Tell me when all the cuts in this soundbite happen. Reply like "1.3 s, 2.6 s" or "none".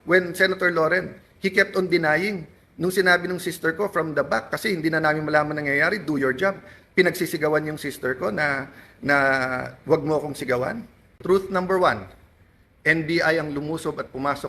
11.2 s